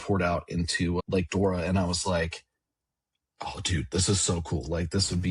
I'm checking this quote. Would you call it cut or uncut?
cut